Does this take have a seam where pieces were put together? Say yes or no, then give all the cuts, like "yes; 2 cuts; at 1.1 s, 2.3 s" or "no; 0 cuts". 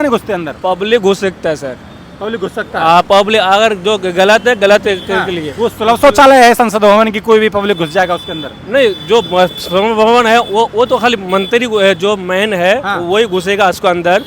no; 0 cuts